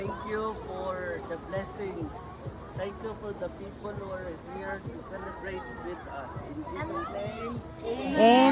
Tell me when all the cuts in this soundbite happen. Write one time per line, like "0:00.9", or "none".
none